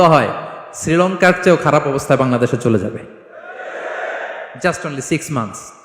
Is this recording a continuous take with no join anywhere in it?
yes; 0 cuts

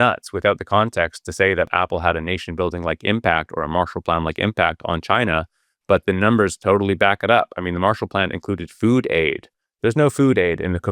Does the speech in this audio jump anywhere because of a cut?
yes; 1 cut; at 1.7 s

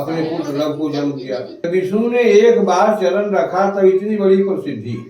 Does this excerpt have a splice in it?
yes; 1 cut; at 1.7 s

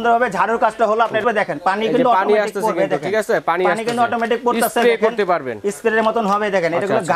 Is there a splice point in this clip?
yes; 1 cut; at 1.2 s

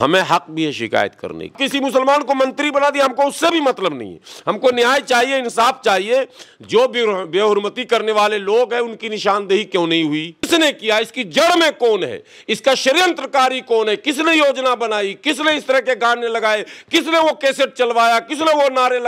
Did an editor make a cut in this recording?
yes; 2 cuts; at 1.5 s, 10.5 s

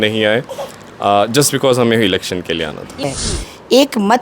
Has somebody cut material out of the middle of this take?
yes; 1 cut; at 3.0 s

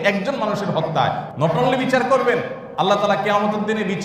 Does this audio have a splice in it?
yes; 2 cuts; at 1.3 s, 2.6 s

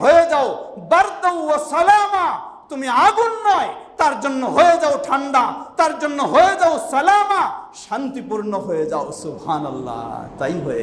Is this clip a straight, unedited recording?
yes; 0 cuts

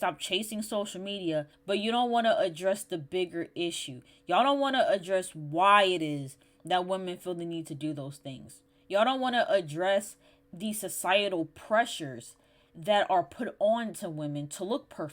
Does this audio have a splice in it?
yes; 1 cut; at 1.5 s

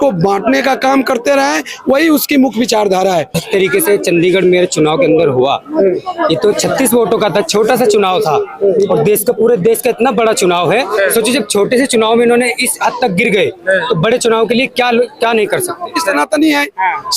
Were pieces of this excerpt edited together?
yes; 2 cuts; at 3.4 s, 16.1 s

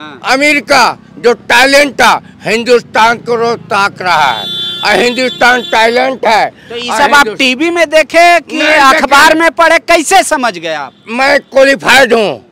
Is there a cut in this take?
no; 0 cuts

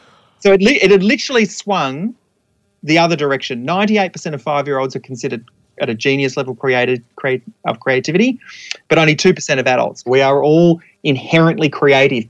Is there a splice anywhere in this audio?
yes; 1 cut; at 10.0 s

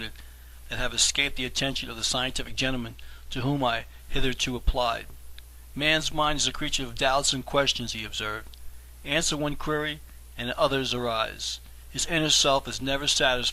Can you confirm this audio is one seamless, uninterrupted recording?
yes; 0 cuts

